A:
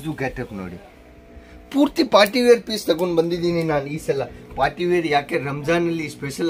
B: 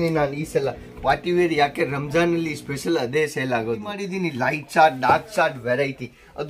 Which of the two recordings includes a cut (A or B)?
B